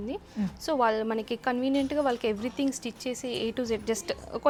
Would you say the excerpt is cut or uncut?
uncut